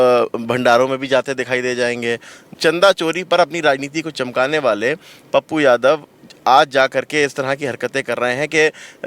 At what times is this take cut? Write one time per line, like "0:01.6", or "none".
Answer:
0:02.5